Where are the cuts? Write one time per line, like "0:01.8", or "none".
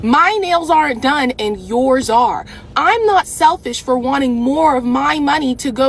none